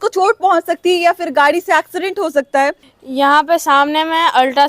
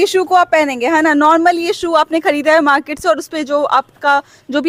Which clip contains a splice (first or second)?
first